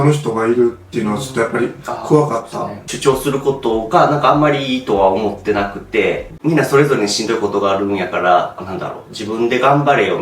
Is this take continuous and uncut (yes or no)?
no